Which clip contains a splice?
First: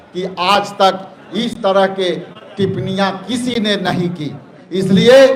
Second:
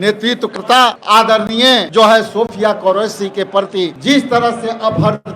second; 3 cuts; at 1.0 s, 1.9 s, 4.0 s

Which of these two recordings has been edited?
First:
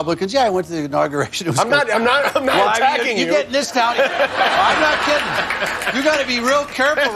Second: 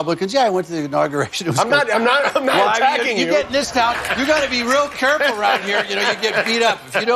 second; 1 cut; at 3.9 s

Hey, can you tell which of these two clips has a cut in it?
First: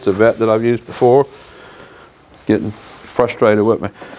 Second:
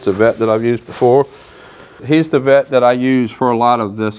second; 1 cut; at 2.0 s

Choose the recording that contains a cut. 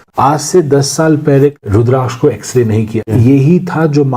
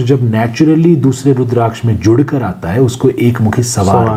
first; 2 cuts; at 1.6 s, 3.1 s

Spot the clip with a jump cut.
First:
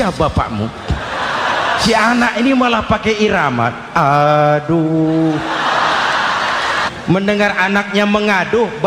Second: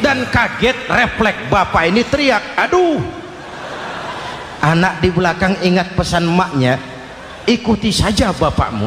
first; 2 cuts; at 1.8 s, 6.8 s

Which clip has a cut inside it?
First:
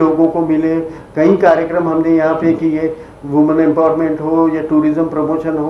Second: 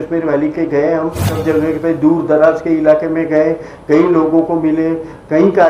second; 1 cut; at 1.3 s

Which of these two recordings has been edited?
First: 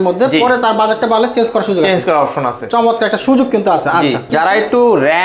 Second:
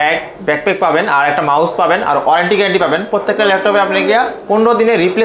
first; 1 cut; at 4.3 s

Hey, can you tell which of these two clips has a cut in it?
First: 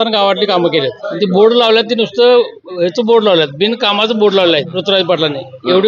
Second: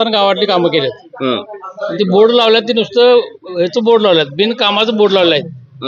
first; 2 cuts; at 1.0 s, 4.7 s

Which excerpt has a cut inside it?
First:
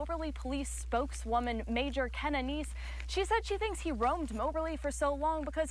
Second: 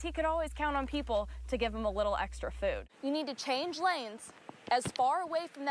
second; 1 cut; at 2.9 s

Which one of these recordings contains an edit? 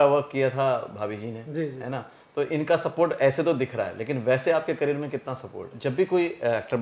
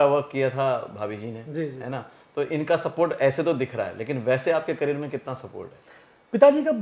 first; 1 cut; at 5.7 s

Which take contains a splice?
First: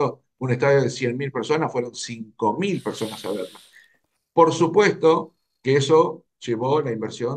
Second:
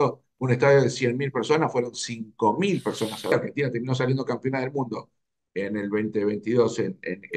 second; 1 cut; at 3.3 s

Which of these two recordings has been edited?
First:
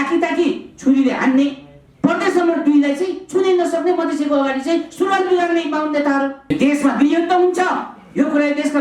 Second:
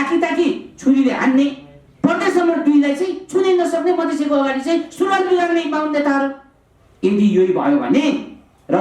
first; 1 cut; at 6.5 s

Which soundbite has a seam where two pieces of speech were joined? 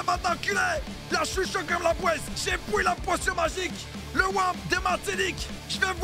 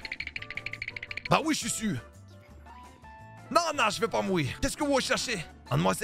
second; 1 cut; at 4.5 s

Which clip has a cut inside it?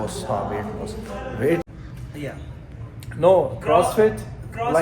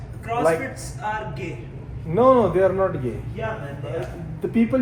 first; 1 cut; at 1.6 s

